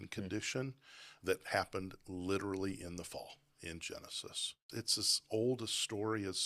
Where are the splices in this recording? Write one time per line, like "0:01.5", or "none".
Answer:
0:04.6